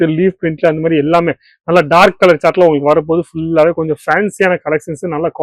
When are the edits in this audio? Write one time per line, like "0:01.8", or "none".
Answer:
none

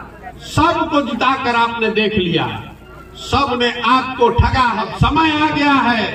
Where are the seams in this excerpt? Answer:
0:04.8

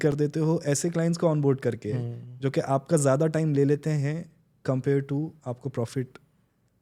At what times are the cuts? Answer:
none

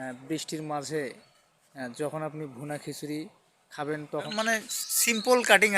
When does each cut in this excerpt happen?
0:04.3

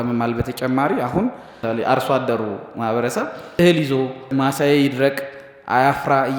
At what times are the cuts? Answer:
0:01.5
0:03.6
0:04.3

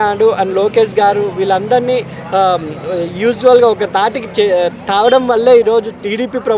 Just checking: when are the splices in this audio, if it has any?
none

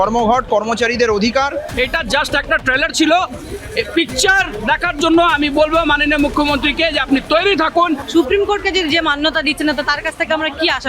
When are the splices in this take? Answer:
0:01.7
0:08.0

